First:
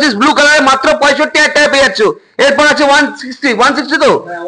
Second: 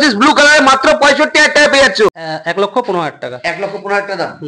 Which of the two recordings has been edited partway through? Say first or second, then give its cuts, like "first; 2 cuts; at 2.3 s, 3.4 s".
second; 1 cut; at 2.2 s